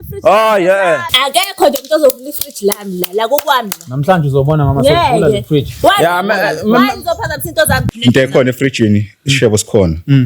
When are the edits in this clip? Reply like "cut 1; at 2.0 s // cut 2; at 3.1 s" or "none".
cut 1; at 1.1 s // cut 2; at 7.8 s